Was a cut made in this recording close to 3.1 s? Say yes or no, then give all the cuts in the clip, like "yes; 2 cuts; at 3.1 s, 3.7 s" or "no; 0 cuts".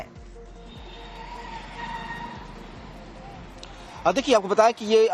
yes; 1 cut; at 3.1 s